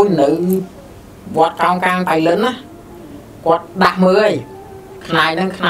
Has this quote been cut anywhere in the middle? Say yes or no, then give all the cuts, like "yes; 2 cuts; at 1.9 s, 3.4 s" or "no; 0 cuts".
no; 0 cuts